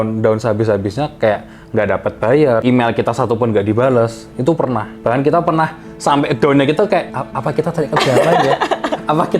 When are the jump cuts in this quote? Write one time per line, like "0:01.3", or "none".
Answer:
0:07.2